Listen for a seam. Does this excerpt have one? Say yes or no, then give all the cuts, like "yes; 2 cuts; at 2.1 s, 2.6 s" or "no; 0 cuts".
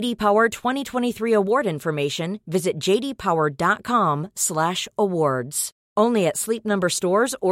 no; 0 cuts